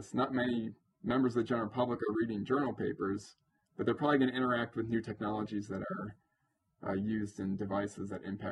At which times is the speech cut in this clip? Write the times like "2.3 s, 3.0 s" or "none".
none